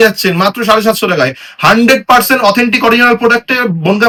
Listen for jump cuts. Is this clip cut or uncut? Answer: uncut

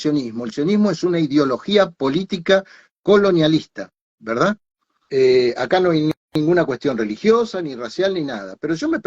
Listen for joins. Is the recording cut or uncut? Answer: uncut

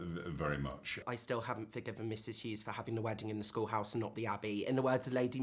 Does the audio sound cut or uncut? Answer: cut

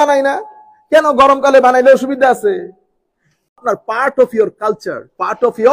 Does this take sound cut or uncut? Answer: cut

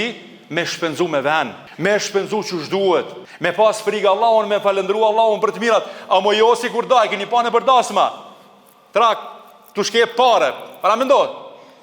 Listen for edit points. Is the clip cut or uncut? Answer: cut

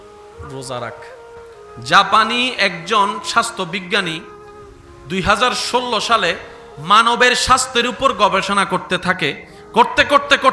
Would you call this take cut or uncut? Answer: cut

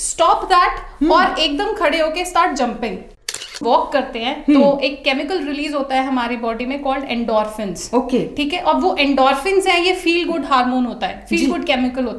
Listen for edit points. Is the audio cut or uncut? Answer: cut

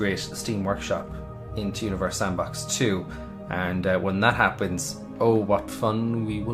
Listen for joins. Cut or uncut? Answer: cut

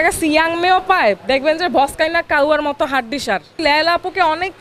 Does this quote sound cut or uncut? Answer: cut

